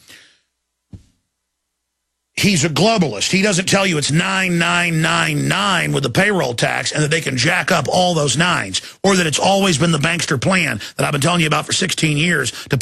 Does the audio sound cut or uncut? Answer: uncut